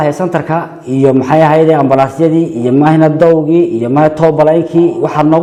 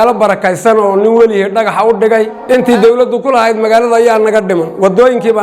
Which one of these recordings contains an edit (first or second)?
second